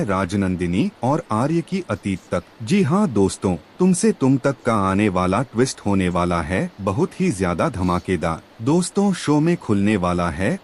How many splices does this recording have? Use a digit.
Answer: 3